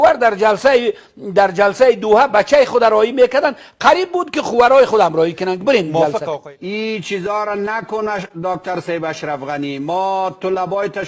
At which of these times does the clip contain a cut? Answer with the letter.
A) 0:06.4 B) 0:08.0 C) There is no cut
A